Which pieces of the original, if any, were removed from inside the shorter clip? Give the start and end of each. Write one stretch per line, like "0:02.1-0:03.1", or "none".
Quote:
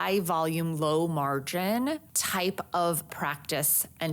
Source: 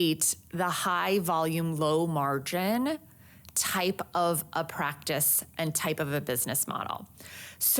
0:03.1-0:03.6
0:04.5-0:04.7